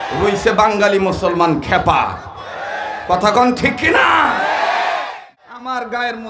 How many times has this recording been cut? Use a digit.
1